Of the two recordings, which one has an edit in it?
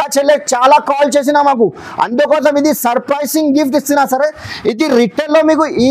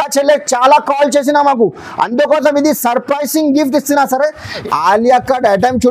second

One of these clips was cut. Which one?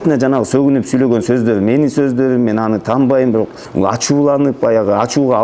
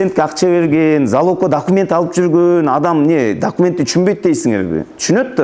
first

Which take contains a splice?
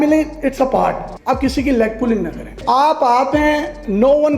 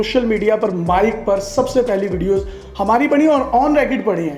first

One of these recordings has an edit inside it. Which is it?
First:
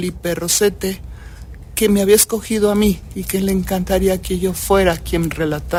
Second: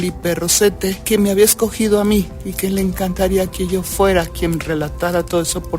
second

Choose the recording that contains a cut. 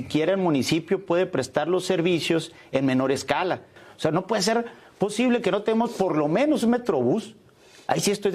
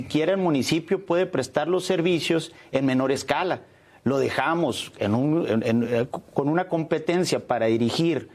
first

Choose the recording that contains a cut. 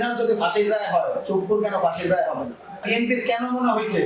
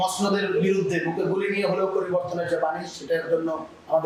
first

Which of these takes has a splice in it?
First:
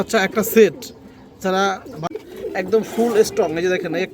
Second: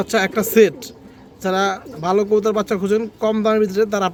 first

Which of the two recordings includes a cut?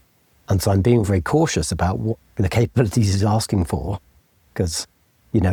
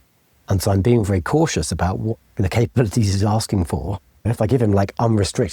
second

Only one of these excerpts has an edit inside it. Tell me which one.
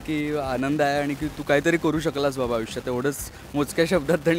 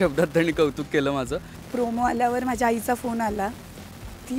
second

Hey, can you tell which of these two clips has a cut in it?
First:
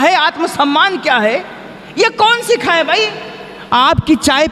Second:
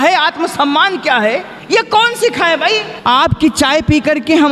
second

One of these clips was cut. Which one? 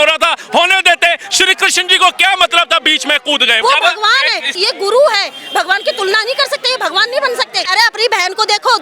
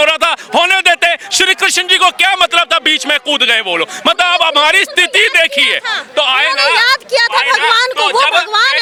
first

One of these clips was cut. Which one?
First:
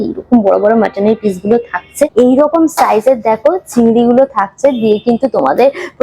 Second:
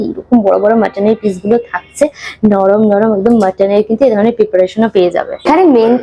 first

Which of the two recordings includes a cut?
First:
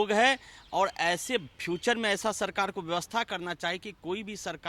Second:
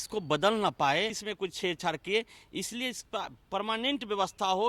second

